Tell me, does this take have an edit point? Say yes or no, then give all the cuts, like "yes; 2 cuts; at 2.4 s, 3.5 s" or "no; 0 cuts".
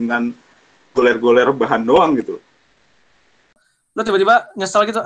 yes; 1 cut; at 3.6 s